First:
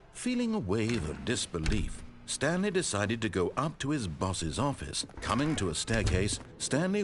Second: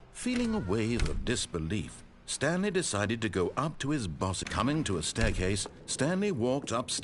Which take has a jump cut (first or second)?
second